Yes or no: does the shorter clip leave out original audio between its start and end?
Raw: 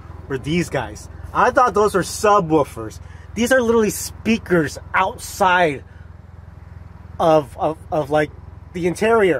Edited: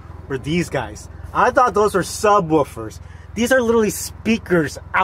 no